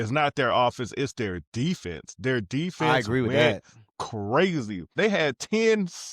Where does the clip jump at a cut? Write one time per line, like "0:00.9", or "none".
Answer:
0:04.9